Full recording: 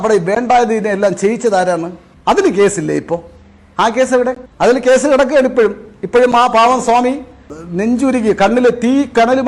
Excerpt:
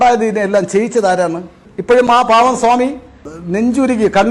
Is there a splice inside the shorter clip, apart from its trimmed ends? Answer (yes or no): yes